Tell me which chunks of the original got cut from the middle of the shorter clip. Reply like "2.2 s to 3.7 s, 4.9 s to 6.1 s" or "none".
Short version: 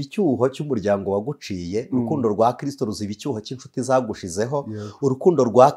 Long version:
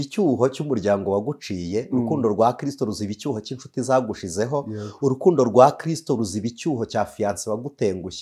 none